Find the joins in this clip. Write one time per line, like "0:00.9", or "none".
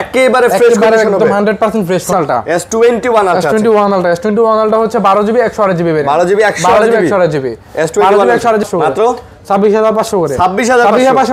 0:02.1
0:08.6